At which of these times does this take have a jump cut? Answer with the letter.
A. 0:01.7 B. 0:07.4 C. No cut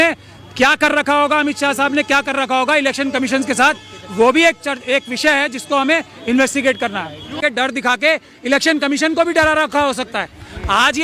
B